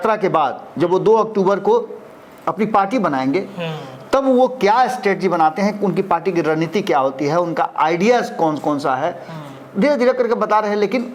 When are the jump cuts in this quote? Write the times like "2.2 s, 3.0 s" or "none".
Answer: none